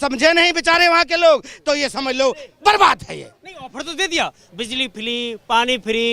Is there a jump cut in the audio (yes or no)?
no